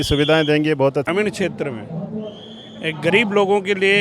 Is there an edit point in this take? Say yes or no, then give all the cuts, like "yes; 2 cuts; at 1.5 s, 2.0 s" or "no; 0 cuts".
yes; 1 cut; at 1.1 s